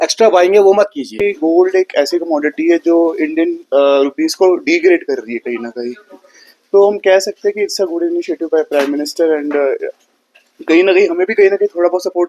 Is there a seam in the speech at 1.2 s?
yes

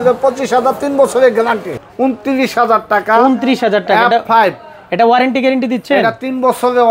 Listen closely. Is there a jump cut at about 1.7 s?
yes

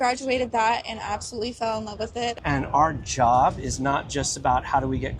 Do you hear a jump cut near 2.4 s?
yes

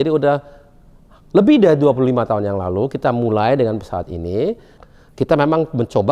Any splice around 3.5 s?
no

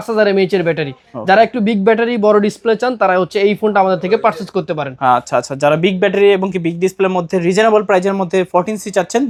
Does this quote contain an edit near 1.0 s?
no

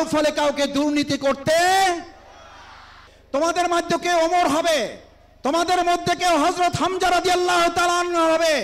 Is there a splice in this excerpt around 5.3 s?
no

